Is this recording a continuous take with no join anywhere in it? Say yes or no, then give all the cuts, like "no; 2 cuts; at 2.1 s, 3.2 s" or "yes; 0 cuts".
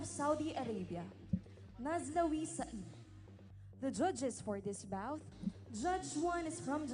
no; 1 cut; at 1.5 s